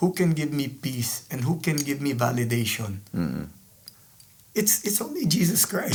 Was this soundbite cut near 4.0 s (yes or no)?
no